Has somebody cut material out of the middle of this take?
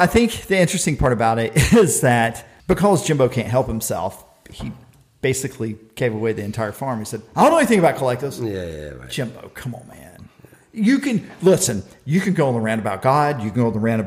yes; 1 cut; at 2.5 s

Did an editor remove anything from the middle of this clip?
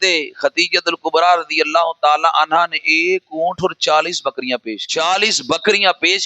yes; 1 cut; at 4.8 s

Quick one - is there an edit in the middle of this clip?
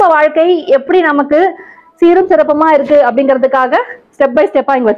no; 0 cuts

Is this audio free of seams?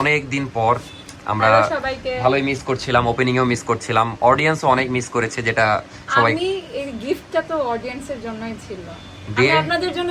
yes; 0 cuts

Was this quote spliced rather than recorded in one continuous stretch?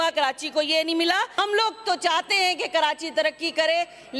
yes; 1 cut; at 1.3 s

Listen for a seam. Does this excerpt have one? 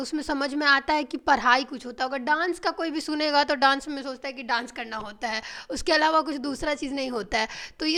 no; 0 cuts

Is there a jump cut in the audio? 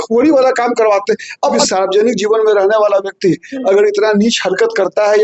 yes; 1 cut; at 1.6 s

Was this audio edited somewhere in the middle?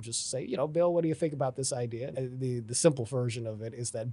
yes; 1 cut; at 2.2 s

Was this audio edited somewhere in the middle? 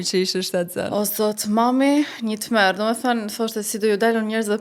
no; 0 cuts

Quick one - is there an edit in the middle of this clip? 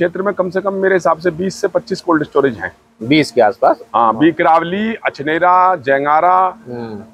no; 0 cuts

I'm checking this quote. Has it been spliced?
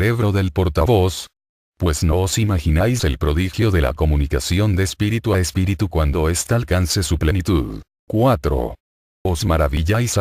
yes; 1 cut; at 3.8 s

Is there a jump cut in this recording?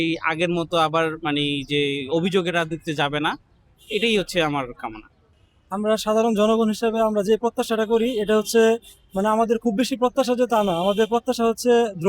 no; 0 cuts

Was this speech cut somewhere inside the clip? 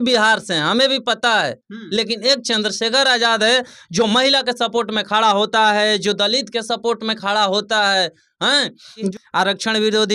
yes; 1 cut; at 9.1 s

